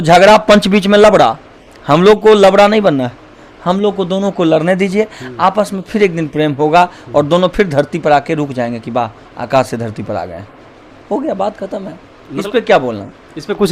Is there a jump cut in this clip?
no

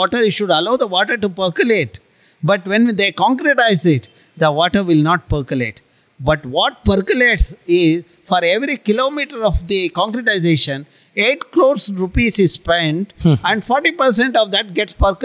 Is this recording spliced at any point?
no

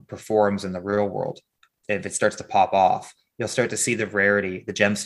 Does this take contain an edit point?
no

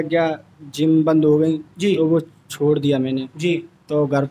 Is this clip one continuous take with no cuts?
yes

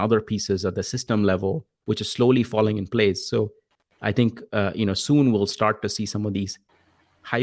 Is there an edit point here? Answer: no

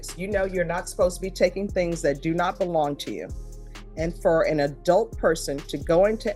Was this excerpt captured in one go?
yes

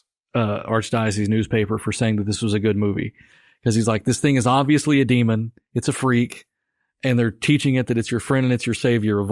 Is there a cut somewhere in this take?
no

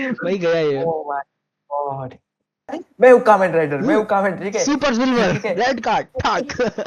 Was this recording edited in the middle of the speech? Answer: yes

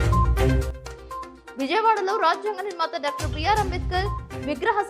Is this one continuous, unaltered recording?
no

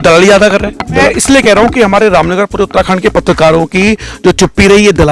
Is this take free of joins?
no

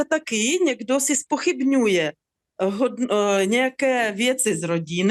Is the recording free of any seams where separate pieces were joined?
yes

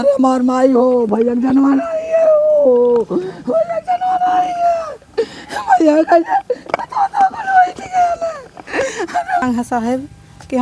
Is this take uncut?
no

